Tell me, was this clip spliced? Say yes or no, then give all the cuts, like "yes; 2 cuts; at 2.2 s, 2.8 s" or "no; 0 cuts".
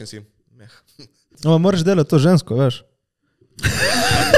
yes; 1 cut; at 1.1 s